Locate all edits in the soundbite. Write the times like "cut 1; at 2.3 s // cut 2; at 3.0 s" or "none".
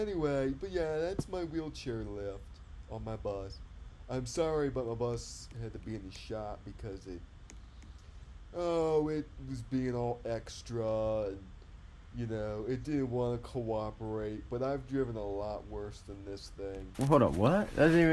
cut 1; at 16.9 s